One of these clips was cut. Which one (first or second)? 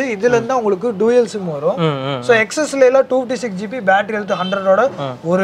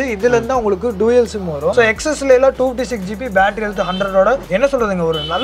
second